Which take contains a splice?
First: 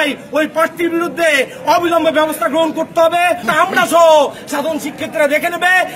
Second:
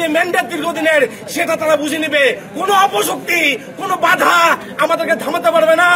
first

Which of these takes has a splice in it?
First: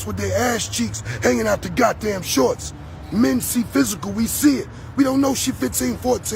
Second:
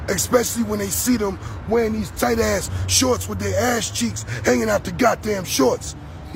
first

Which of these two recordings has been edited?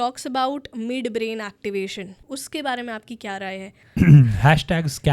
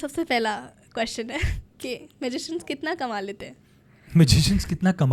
first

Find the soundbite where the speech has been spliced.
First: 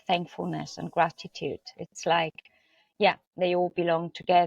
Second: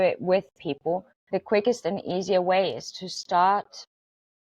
second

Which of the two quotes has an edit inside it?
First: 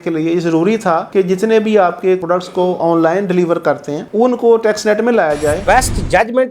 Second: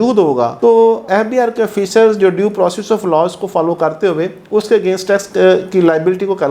first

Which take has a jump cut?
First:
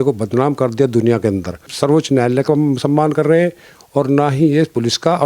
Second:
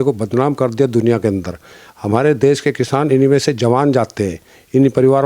first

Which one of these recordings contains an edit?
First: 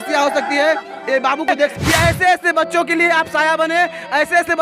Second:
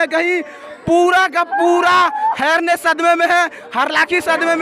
first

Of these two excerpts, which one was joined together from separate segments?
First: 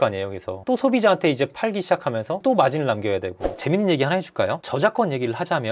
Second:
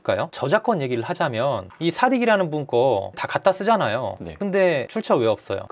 first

